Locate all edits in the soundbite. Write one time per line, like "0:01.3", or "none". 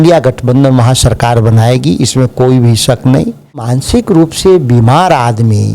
0:03.8